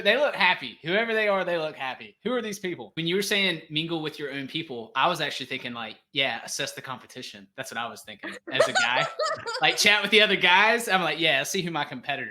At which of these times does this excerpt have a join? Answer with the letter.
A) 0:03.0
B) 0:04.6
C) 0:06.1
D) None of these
A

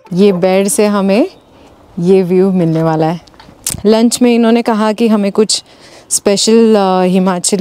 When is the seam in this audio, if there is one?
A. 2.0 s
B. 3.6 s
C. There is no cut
B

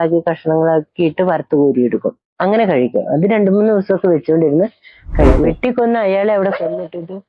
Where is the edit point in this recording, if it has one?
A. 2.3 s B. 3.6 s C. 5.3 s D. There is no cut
C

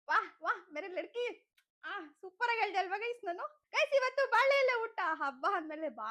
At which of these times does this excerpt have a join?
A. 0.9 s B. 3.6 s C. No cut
B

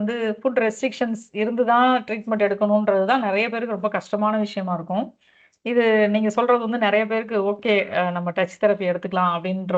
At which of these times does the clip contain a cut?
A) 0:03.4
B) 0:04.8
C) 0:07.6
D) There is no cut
D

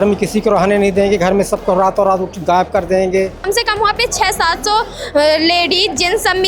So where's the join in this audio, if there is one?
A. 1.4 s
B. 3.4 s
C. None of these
B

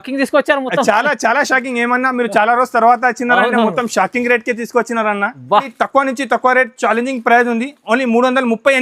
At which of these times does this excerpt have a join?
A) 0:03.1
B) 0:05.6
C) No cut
B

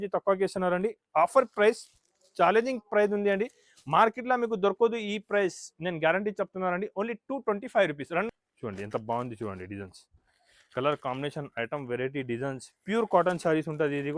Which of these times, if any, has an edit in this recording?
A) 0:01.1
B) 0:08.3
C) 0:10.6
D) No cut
B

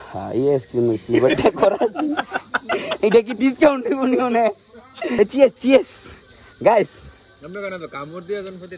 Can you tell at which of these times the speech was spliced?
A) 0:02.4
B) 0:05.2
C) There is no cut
B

